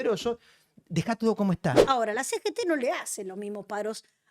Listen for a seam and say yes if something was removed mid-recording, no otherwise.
yes